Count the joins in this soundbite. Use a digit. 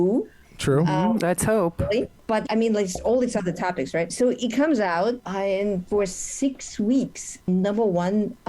4